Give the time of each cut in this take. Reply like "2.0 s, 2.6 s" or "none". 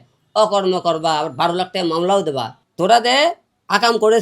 2.6 s